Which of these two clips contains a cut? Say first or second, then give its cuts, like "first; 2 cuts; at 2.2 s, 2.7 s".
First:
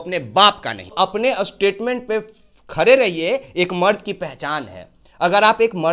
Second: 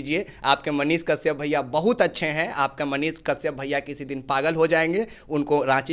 first; 1 cut; at 0.9 s